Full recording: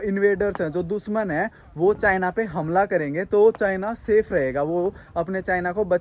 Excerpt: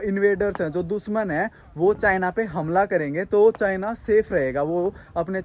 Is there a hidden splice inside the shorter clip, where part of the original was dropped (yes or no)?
no